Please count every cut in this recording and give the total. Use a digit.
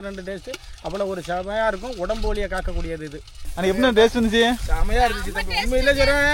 1